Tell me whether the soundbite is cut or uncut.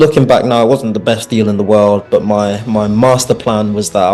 uncut